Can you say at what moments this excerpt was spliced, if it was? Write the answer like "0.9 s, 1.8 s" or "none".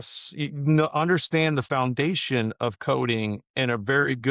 1.7 s